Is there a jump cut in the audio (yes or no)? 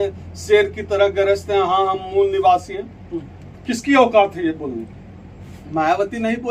no